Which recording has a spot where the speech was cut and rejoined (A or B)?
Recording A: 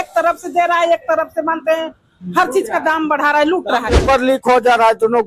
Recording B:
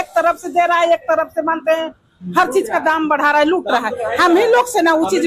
A